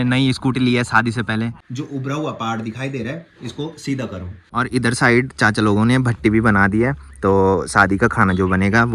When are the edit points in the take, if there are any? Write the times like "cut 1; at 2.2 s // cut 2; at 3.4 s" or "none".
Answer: cut 1; at 1.6 s // cut 2; at 4.5 s